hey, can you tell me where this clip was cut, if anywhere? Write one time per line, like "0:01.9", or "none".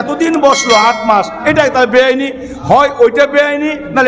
none